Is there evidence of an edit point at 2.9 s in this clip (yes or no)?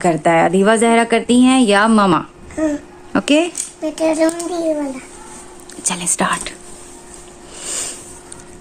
no